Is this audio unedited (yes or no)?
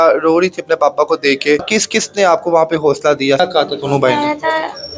no